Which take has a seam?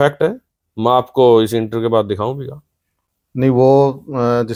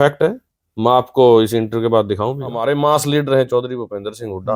second; 1 cut; at 2.6 s

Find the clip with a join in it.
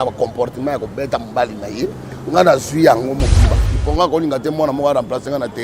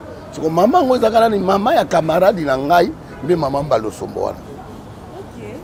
first; 1 cut; at 3.7 s

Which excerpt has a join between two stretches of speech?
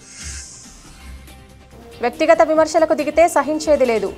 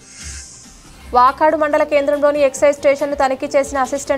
second; 1 cut; at 0.9 s

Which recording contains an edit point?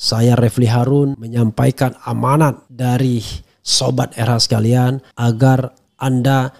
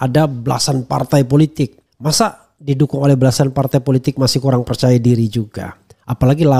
first; 3 cuts; at 1.2 s, 2.7 s, 5.1 s

